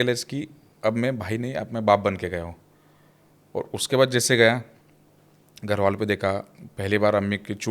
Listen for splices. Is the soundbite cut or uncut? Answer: uncut